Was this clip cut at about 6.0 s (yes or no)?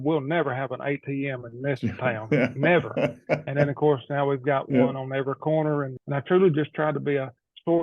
yes